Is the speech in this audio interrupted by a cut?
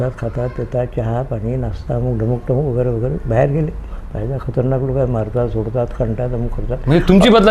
no; 0 cuts

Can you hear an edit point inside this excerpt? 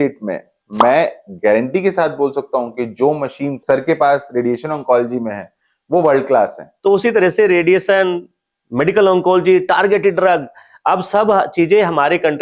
yes; 2 cuts; at 3.6 s, 6.7 s

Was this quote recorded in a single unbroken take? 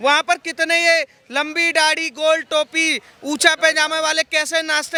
yes; 0 cuts

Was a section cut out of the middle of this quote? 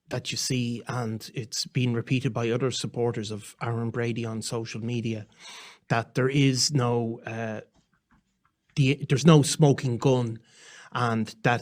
no; 0 cuts

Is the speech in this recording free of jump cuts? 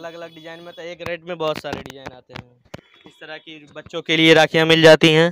no; 1 cut; at 2.8 s

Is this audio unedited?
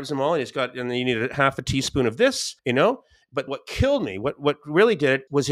yes; 0 cuts

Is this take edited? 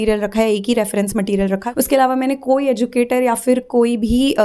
yes; 1 cut; at 1.7 s

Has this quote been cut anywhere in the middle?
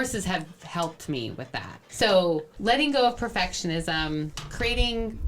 yes; 1 cut; at 1.9 s

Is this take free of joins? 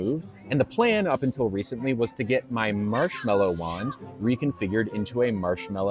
yes; 0 cuts

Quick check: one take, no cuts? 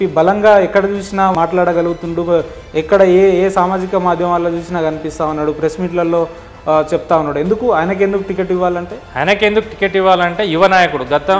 no; 2 cuts; at 1.3 s, 9.0 s

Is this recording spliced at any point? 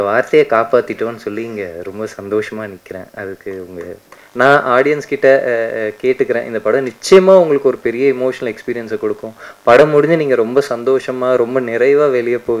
yes; 1 cut; at 4.2 s

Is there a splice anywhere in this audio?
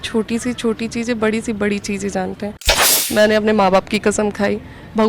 yes; 1 cut; at 2.7 s

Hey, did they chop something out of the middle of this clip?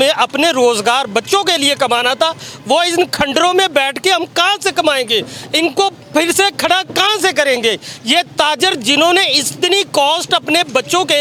no; 0 cuts

